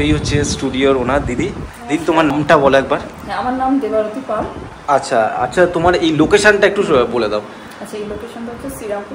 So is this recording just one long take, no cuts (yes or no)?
no